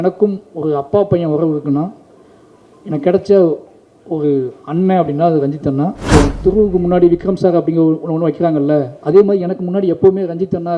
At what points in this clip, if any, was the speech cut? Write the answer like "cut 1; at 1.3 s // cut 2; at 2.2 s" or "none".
cut 1; at 6.1 s